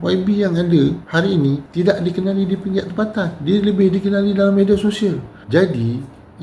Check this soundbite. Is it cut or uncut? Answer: cut